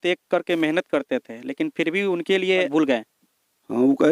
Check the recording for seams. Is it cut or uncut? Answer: cut